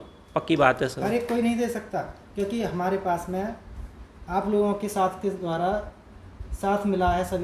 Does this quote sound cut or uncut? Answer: uncut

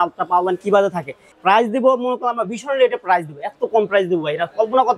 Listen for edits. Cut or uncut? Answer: cut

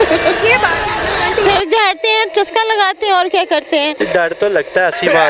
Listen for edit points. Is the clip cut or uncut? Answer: cut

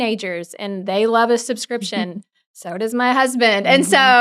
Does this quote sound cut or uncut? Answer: uncut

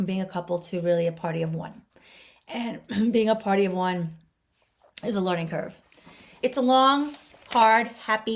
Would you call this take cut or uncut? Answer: cut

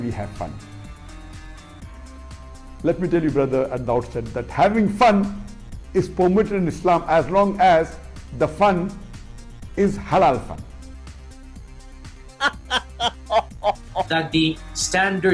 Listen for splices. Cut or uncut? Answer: uncut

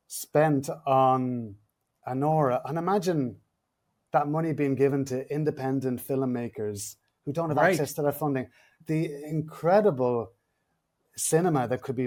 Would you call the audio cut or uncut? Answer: uncut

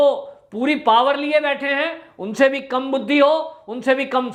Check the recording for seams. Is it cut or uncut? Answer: uncut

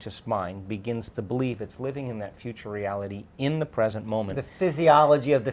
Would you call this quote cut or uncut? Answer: uncut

